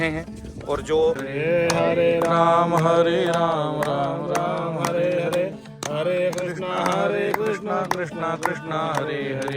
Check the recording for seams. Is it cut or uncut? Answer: cut